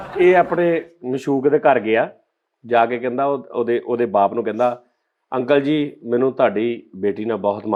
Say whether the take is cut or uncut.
uncut